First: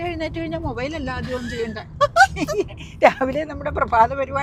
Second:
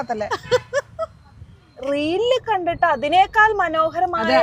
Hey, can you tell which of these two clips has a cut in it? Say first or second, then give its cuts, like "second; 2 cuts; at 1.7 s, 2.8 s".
second; 1 cut; at 1.7 s